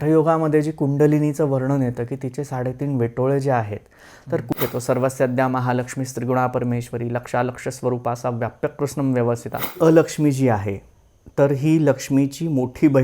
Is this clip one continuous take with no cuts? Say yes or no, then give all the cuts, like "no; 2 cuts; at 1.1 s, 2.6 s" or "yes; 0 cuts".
no; 2 cuts; at 4.6 s, 9.8 s